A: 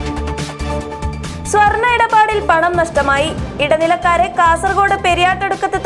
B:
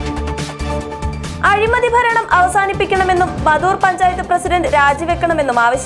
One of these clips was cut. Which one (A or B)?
B